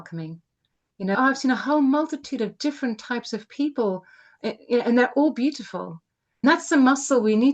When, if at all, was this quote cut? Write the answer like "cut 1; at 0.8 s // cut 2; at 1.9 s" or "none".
cut 1; at 1.2 s // cut 2; at 6.4 s